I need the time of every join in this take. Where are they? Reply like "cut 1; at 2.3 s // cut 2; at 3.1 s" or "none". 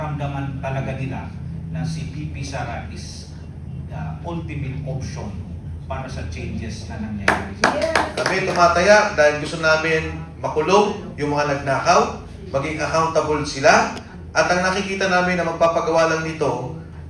cut 1; at 8.2 s